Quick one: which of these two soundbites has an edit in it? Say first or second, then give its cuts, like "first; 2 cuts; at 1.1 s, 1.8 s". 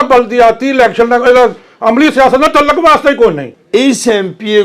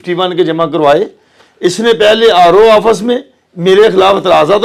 first; 1 cut; at 3.5 s